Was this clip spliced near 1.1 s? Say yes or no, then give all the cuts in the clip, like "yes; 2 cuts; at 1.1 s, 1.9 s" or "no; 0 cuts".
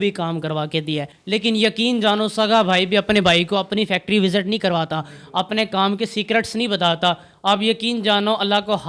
yes; 1 cut; at 1.1 s